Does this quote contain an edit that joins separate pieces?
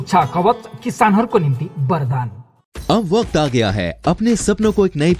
no; 0 cuts

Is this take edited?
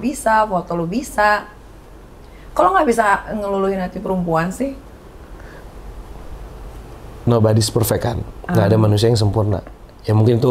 no; 0 cuts

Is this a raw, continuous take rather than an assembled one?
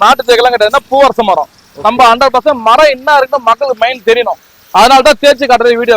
yes; 0 cuts

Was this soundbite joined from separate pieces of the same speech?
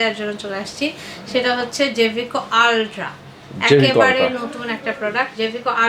no; 0 cuts

